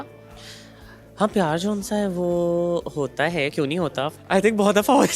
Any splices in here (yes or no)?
yes